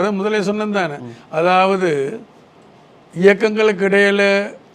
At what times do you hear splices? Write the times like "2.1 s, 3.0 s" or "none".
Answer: none